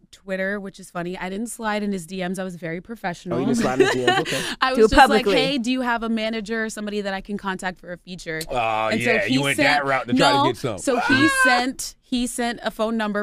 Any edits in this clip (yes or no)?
yes